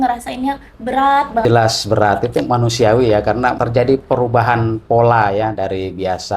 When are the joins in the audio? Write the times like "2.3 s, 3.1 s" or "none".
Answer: 1.4 s, 3.6 s